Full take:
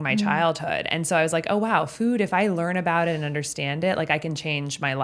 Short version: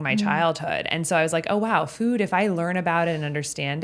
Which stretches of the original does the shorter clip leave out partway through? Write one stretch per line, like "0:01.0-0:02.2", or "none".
none